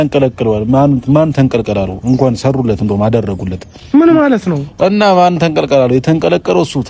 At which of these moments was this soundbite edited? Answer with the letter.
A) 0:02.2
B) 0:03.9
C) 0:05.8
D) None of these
D